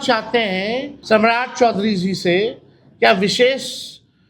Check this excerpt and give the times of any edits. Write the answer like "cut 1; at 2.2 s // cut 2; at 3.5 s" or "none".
cut 1; at 0.9 s